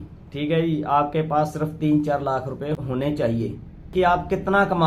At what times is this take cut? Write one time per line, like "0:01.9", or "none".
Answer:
0:02.8
0:03.9